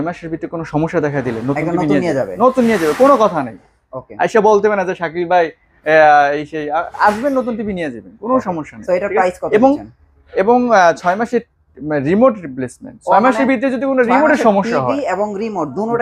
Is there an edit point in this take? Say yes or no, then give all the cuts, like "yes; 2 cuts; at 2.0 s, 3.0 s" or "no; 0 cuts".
no; 0 cuts